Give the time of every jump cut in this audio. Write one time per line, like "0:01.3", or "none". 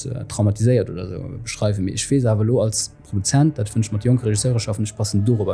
none